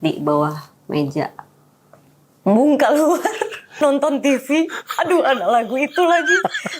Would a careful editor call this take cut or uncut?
cut